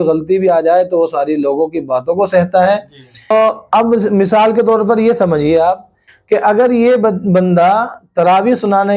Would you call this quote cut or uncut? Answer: cut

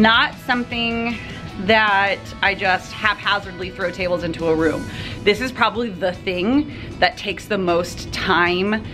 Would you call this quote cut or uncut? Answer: uncut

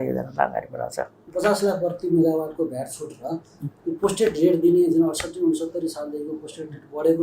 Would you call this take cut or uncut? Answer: cut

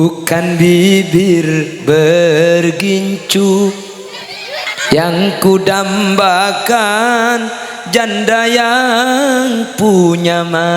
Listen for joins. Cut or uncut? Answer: cut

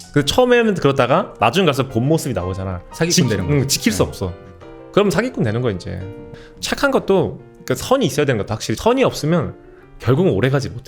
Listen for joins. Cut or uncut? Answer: uncut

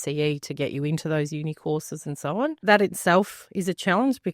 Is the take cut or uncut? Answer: cut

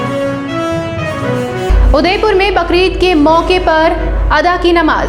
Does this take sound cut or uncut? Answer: cut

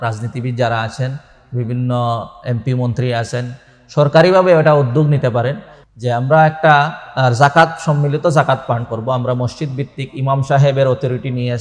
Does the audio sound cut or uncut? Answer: uncut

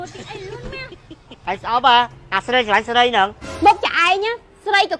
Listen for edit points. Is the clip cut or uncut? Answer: cut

